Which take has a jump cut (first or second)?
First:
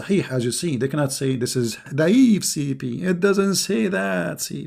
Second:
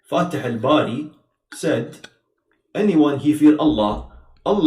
first